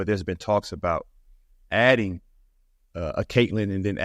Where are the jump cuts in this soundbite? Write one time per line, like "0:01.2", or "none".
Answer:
none